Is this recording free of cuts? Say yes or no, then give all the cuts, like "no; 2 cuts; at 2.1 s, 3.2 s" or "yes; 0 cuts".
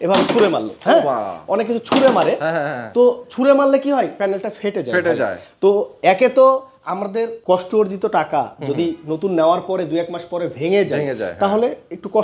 yes; 0 cuts